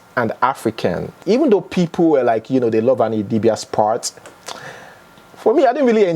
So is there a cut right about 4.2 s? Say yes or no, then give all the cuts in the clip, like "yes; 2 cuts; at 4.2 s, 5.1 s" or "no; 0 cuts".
no; 1 cut; at 1.1 s